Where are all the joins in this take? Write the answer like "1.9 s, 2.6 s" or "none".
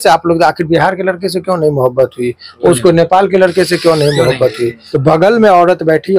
4.8 s